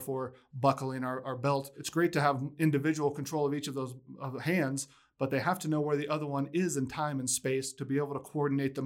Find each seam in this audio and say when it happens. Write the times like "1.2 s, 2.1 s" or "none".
none